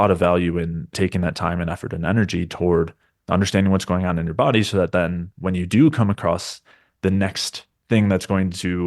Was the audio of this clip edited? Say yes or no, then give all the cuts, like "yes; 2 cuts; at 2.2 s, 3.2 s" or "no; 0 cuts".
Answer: yes; 1 cut; at 0.9 s